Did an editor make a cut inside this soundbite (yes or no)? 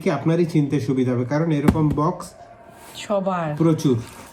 no